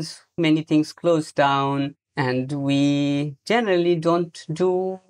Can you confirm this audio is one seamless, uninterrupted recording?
yes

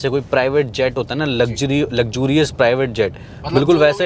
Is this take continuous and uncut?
yes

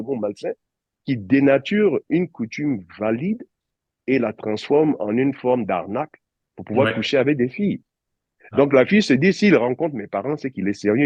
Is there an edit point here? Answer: no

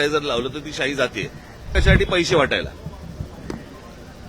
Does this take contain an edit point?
yes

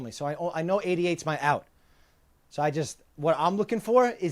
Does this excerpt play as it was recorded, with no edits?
yes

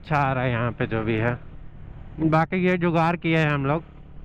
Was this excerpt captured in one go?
yes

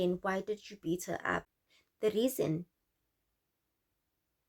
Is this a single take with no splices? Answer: no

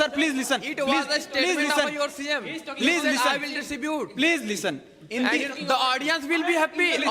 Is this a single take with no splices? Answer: yes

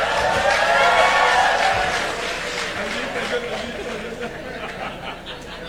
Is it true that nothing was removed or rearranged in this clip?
yes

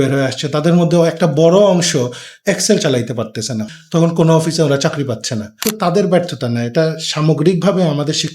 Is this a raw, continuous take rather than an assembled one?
no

